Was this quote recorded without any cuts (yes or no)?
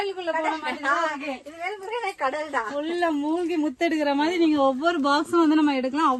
yes